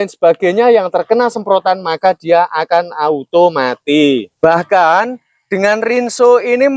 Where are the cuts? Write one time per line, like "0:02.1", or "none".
0:04.3